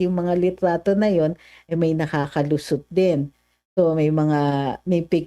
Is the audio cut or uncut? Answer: uncut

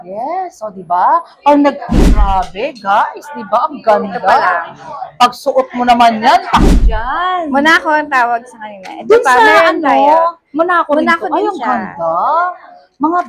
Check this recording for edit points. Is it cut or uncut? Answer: cut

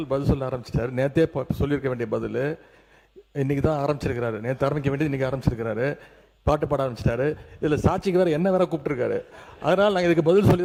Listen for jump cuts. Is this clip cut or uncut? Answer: uncut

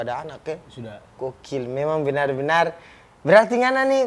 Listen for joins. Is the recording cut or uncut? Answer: uncut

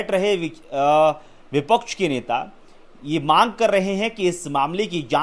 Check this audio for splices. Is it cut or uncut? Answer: uncut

